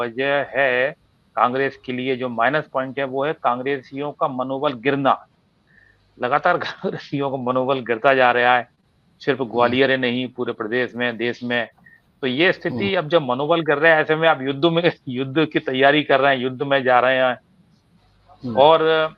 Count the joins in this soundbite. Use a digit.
0